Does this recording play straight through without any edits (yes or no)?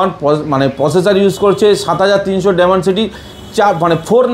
yes